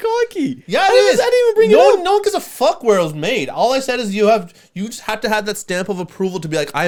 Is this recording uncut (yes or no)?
yes